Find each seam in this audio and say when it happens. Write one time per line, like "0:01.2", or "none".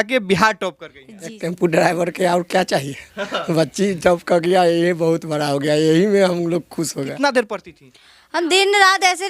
0:01.4
0:07.2